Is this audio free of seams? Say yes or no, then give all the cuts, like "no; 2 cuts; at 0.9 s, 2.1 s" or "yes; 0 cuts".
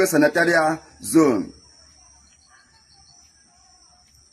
yes; 0 cuts